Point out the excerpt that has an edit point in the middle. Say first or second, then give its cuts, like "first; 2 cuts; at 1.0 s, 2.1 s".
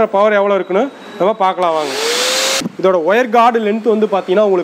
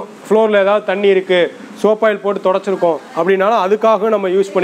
first; 1 cut; at 2.6 s